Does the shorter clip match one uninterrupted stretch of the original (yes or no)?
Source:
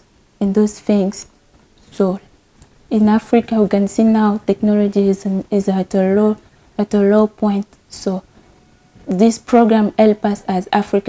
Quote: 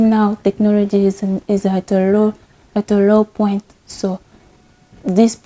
yes